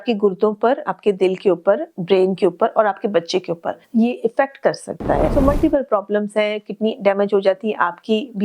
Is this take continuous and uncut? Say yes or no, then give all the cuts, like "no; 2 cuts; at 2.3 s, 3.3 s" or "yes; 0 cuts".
no; 2 cuts; at 3.7 s, 5.3 s